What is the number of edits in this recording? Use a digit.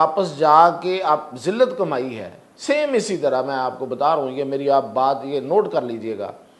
0